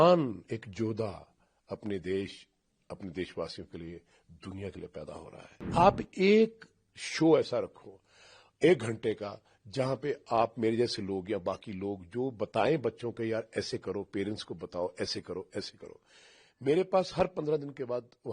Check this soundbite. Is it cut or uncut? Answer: cut